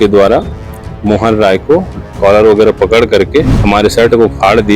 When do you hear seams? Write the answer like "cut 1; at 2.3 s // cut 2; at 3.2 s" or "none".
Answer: cut 1; at 3.6 s